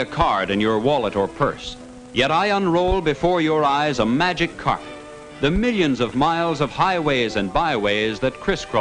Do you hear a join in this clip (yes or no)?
no